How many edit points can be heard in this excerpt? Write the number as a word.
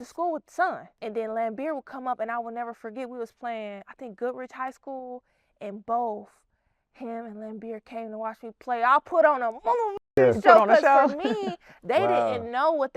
one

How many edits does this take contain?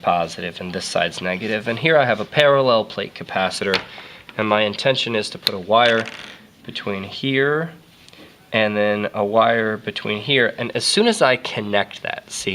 one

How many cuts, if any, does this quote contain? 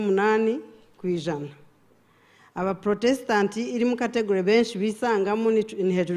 zero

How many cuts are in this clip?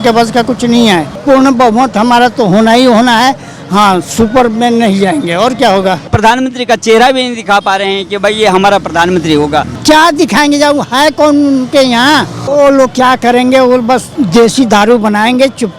five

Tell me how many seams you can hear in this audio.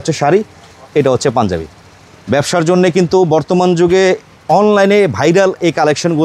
zero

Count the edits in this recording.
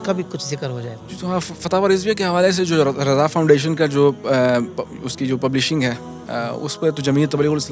zero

